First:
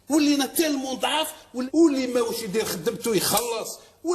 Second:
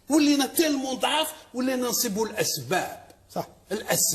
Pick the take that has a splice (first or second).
first